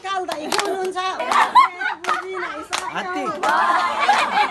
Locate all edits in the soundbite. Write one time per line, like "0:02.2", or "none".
0:01.2